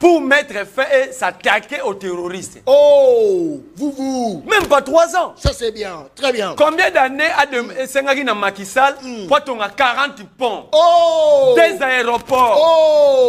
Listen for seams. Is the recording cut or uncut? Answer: uncut